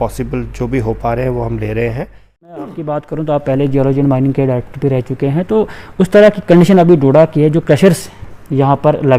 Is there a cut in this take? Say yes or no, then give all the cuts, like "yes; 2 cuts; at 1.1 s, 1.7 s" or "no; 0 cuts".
yes; 1 cut; at 2.6 s